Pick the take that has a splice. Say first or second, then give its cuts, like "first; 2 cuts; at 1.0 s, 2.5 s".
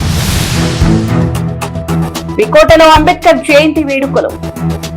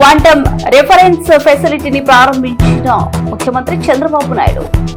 first; 1 cut; at 1.9 s